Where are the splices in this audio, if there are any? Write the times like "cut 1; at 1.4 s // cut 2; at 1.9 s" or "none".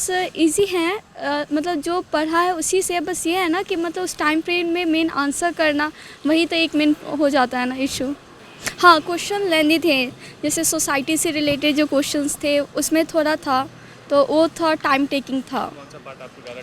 none